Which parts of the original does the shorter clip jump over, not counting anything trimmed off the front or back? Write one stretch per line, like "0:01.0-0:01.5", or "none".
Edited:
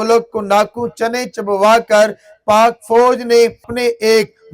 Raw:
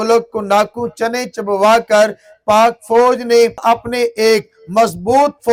0:03.6-0:03.8